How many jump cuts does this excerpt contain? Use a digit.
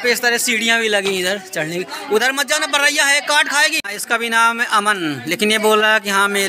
1